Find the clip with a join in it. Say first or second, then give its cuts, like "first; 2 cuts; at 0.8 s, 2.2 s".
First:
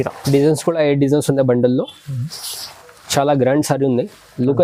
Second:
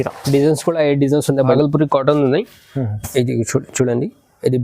second; 1 cut; at 1.6 s